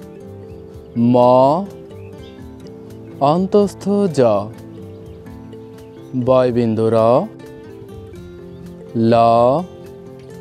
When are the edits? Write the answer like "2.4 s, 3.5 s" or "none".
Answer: 7.3 s, 8.9 s, 9.7 s